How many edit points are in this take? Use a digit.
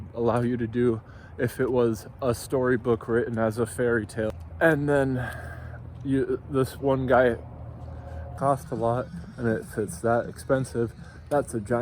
2